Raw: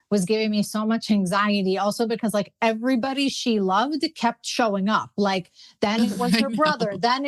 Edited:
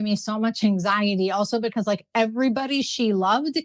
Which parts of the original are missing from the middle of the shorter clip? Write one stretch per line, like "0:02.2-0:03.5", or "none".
none